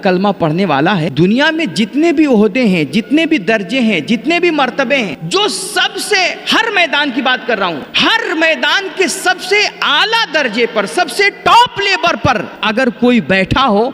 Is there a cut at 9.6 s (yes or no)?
no